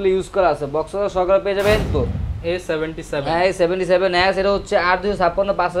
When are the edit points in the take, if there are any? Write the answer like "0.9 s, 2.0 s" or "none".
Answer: 1.9 s